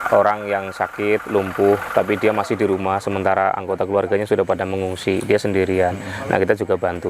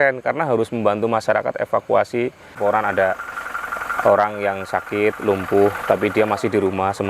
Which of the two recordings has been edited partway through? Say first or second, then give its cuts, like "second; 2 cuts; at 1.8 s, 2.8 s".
second; 1 cut; at 2.6 s